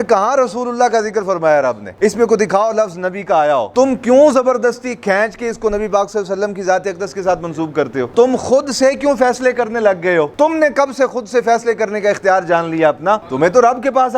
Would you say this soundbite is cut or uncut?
cut